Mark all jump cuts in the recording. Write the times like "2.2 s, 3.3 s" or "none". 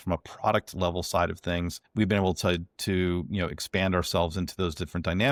none